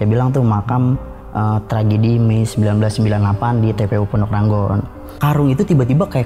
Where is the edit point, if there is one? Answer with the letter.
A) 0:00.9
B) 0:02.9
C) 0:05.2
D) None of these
C